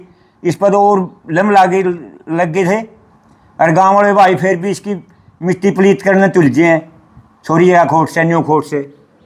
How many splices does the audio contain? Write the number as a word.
zero